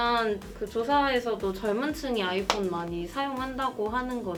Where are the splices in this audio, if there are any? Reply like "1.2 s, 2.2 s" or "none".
none